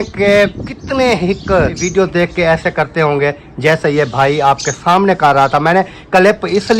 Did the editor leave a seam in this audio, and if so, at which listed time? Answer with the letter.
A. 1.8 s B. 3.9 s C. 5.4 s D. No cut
A